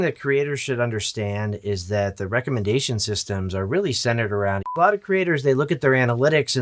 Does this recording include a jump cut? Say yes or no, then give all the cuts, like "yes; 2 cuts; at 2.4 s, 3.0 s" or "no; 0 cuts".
yes; 1 cut; at 4.8 s